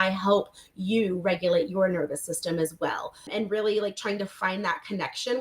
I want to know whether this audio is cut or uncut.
cut